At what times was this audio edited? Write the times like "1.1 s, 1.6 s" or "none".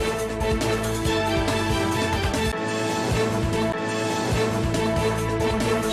1.1 s